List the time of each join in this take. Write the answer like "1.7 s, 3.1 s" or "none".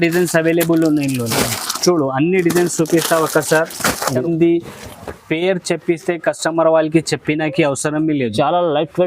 4.2 s